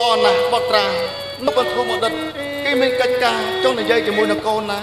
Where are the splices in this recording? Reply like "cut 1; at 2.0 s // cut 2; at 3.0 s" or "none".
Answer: cut 1; at 1.5 s

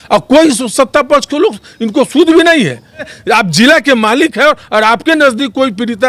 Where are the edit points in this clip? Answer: cut 1; at 3.1 s

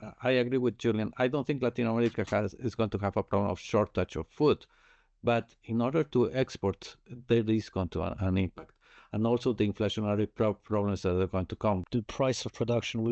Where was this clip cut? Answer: cut 1; at 11.8 s

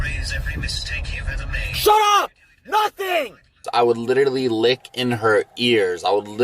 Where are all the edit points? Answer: cut 1; at 3.6 s

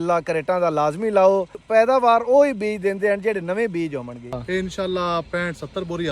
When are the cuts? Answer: cut 1; at 1.6 s // cut 2; at 4.4 s

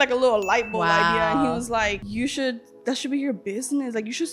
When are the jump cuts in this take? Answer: cut 1; at 2.0 s

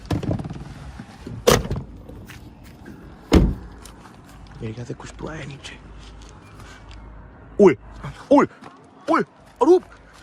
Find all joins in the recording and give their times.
none

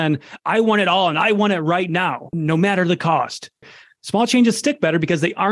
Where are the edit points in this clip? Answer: cut 1; at 2.2 s // cut 2; at 3.8 s

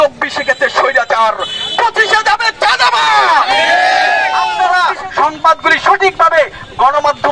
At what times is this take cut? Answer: cut 1; at 4.5 s

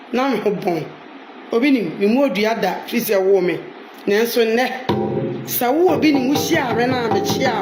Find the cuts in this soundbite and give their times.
none

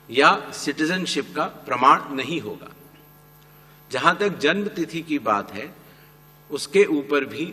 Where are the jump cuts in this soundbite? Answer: none

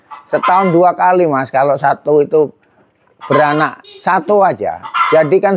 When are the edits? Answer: none

